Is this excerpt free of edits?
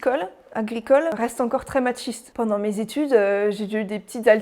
no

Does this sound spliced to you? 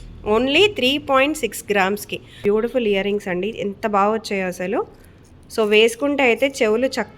yes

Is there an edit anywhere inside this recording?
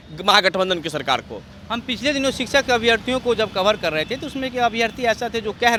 no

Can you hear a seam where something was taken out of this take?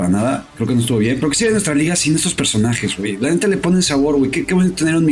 no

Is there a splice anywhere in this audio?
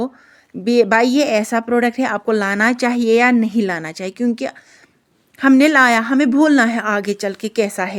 no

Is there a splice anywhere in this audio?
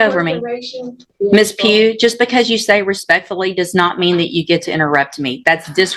yes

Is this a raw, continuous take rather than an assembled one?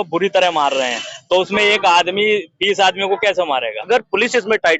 no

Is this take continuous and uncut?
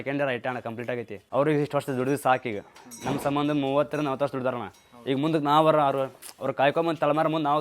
no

